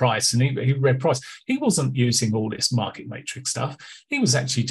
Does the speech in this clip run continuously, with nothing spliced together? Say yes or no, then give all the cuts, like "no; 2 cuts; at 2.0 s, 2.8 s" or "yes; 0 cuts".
yes; 0 cuts